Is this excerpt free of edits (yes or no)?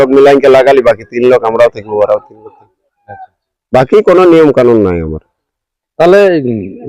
yes